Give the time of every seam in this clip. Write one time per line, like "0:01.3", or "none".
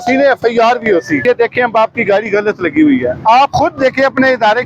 0:01.2

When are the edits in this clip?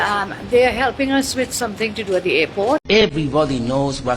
0:02.8

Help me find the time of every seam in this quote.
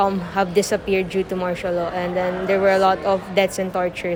none

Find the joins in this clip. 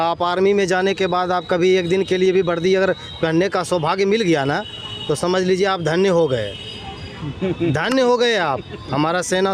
none

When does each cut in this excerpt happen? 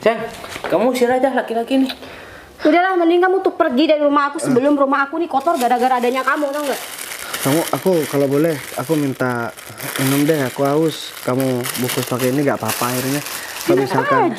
none

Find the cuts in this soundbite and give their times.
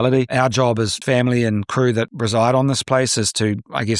0:01.0
0:02.1

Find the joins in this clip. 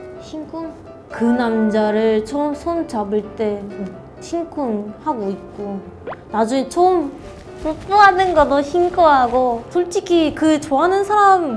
0:01.0

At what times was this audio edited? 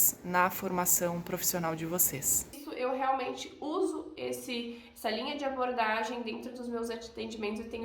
0:02.6

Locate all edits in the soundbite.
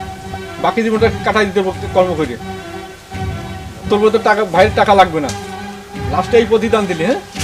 0:02.4
0:03.9

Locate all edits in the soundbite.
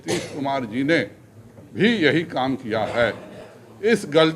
none

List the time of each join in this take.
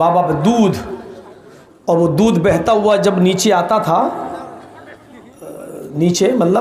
none

